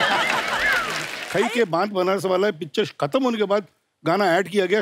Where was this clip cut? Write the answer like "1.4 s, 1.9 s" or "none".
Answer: 1.1 s